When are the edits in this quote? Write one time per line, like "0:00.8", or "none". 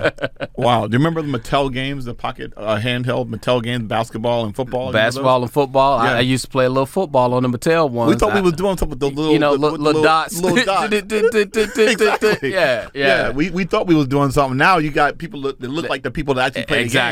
none